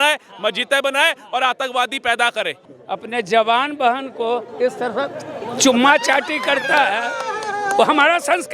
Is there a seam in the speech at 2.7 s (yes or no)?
yes